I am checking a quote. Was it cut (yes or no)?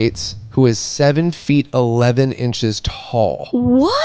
no